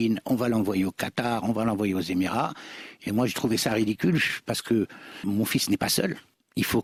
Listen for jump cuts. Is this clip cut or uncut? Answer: uncut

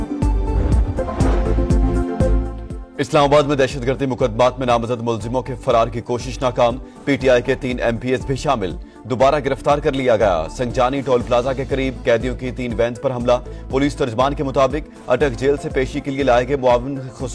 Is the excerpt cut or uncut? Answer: cut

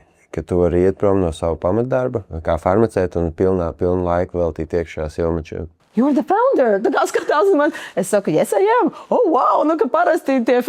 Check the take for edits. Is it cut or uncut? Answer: cut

